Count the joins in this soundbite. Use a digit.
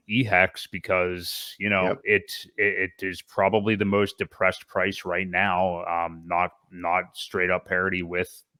0